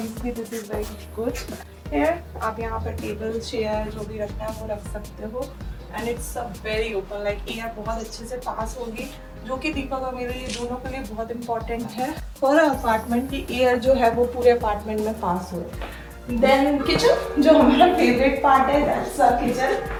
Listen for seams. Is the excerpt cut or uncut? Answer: uncut